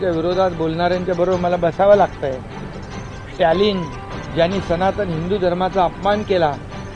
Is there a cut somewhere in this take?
no; 0 cuts

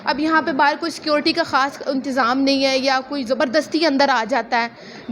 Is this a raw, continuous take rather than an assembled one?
yes; 0 cuts

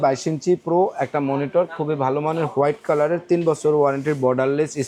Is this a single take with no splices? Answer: yes; 0 cuts

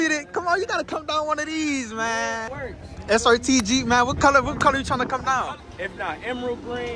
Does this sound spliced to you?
yes; 2 cuts; at 2.5 s, 5.7 s

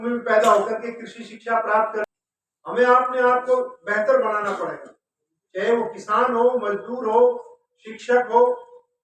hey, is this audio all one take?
no; 1 cut; at 2.1 s

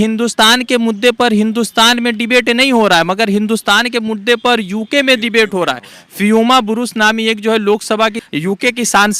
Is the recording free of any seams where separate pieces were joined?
no; 1 cut; at 8.2 s

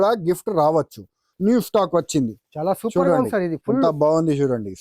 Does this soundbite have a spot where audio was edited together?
yes; 1 cut; at 1.2 s

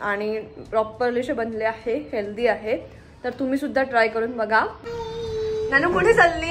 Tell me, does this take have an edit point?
yes; 1 cut; at 4.8 s

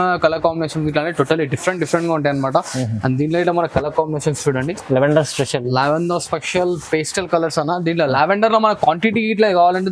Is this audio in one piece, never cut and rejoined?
yes; 0 cuts

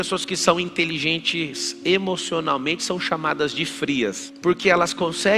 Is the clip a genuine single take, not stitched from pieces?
no; 1 cut; at 4.3 s

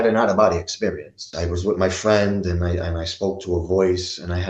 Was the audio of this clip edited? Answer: yes; 1 cut; at 1.3 s

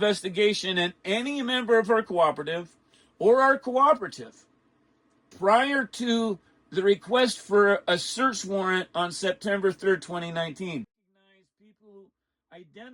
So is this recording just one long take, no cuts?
no; 1 cut; at 11.0 s

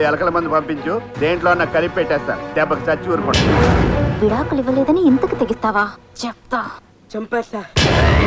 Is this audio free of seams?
yes; 0 cuts

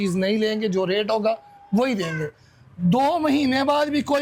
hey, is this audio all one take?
yes; 0 cuts

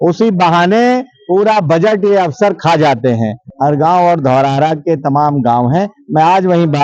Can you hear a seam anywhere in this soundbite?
yes; 1 cut; at 3.4 s

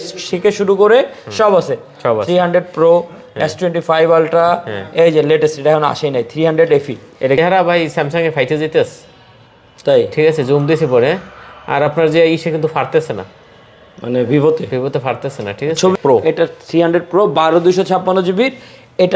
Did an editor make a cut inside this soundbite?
yes; 2 cuts; at 7.4 s, 16.0 s

